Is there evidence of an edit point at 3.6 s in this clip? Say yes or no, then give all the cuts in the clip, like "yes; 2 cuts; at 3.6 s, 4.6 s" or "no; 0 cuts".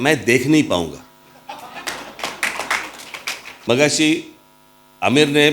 yes; 1 cut; at 3.6 s